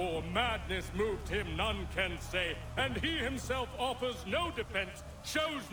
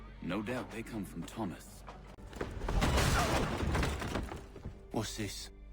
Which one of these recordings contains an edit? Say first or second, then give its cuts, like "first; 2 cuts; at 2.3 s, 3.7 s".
second; 1 cut; at 2.1 s